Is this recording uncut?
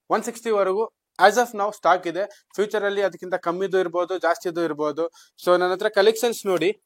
yes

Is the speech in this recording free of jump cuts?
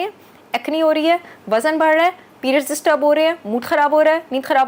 yes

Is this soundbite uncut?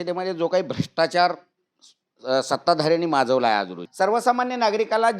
no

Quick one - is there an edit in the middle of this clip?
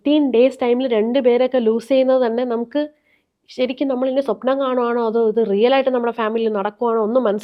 no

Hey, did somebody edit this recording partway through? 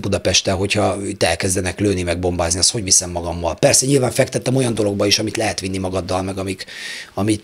no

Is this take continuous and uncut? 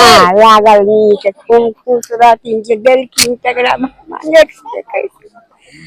yes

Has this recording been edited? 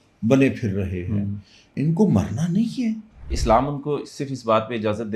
yes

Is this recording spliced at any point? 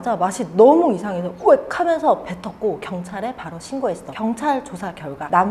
no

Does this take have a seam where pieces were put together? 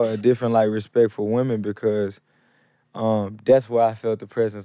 no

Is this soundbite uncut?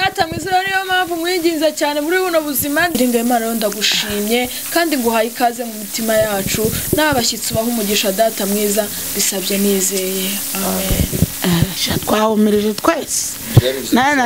no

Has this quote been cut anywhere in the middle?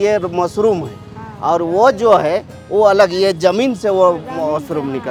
no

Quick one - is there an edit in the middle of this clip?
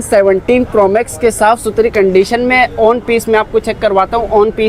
no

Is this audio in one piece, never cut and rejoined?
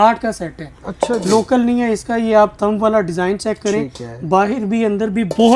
yes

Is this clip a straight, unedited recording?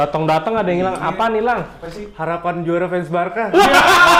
yes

